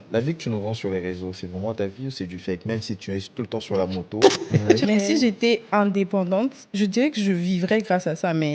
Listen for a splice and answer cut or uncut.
cut